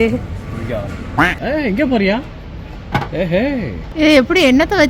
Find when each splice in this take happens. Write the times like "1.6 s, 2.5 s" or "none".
1.4 s, 3.8 s